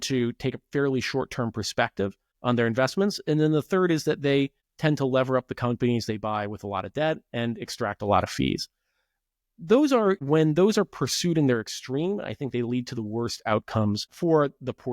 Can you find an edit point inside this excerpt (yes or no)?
yes